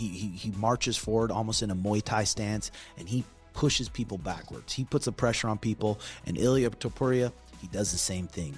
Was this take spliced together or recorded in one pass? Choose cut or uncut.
uncut